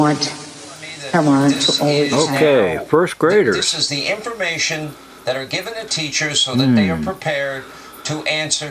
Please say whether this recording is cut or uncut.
cut